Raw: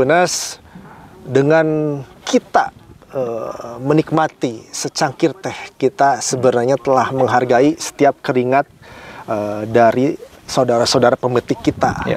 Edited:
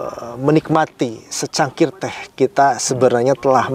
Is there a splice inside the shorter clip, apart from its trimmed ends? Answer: no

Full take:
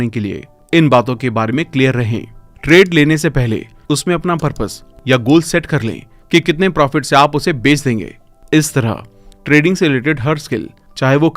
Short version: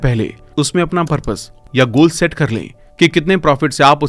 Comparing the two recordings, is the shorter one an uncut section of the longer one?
yes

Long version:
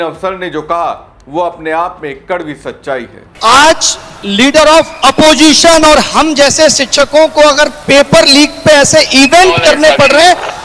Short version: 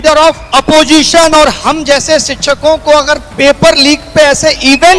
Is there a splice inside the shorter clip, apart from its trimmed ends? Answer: no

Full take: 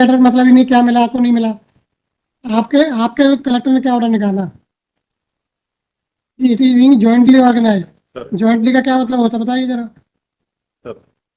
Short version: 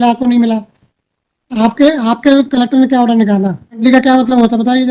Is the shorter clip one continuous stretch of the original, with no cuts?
no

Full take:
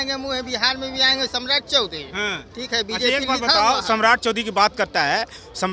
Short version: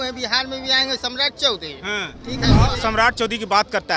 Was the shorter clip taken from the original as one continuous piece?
no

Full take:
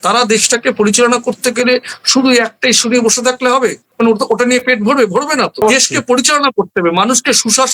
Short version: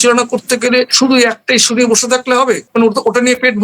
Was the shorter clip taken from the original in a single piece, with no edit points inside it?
no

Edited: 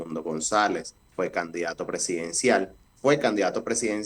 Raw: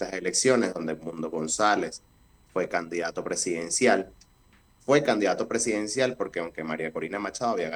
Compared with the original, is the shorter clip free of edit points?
no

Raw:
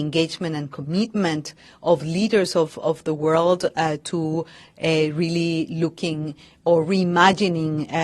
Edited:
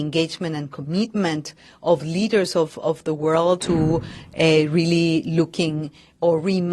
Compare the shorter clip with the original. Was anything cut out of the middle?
yes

